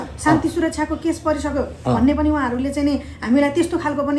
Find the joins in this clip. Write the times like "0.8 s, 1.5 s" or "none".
none

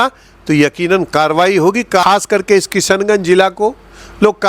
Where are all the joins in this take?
2.0 s

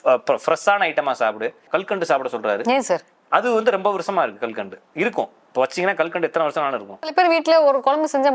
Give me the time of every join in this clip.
1.6 s, 7.1 s

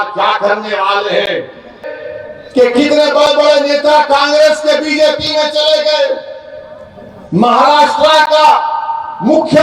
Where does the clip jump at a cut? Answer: 1.8 s

